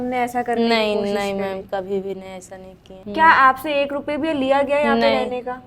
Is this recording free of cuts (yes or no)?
no